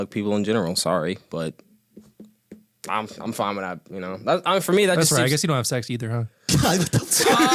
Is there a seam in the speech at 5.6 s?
no; 0 cuts

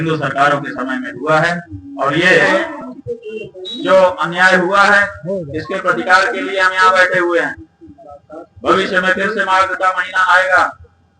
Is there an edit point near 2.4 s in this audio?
yes; 1 cut; at 2.4 s

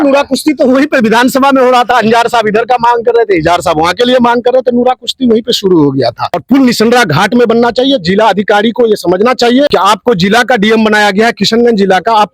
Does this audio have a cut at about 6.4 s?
yes; 2 cuts; at 6.4 s, 9.7 s

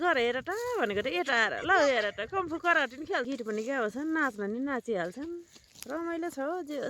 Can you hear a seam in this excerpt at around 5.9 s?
no; 1 cut; at 3.3 s

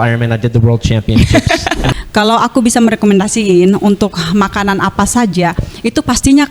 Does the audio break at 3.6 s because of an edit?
no; 1 cut; at 1.9 s

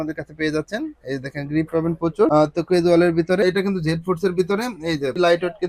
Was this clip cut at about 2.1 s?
no; 1 cut; at 3.4 s

